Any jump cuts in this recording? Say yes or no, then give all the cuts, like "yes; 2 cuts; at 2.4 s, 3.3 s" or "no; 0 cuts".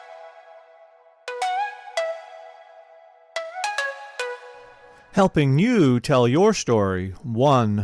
no; 0 cuts